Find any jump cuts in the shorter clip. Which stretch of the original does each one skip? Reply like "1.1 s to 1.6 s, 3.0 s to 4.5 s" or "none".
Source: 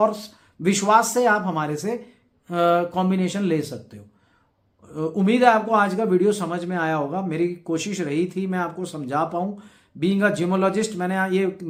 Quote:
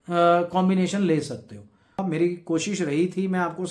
4.4 s to 7.2 s